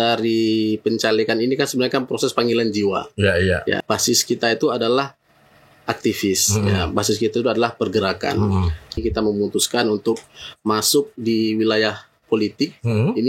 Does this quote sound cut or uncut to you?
cut